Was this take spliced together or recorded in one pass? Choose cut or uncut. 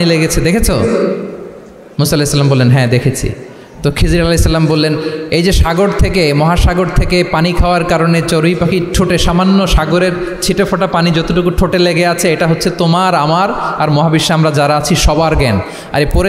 uncut